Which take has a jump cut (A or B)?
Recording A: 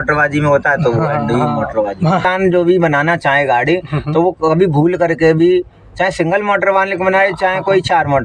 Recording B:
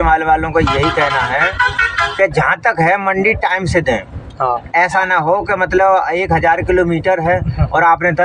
A